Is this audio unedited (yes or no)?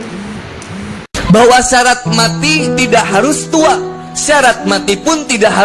no